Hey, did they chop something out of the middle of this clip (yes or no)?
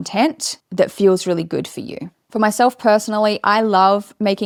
no